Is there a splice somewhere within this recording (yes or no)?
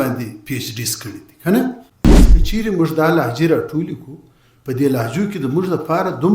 yes